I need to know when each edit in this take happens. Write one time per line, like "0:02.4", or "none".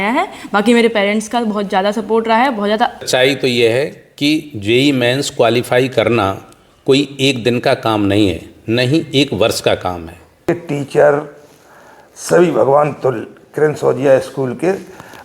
0:03.0
0:10.4